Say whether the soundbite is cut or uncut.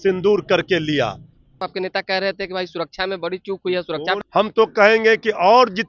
cut